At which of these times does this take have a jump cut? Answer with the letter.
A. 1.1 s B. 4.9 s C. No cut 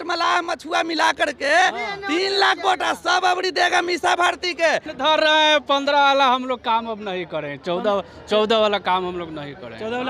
B